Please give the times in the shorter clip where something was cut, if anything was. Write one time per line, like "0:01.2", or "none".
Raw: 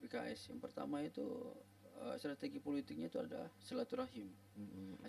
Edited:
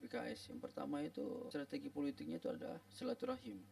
0:01.5